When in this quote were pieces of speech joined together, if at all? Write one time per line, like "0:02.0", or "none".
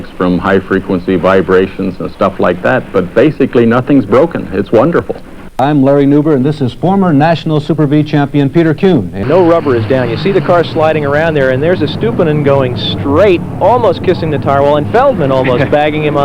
0:05.6
0:09.2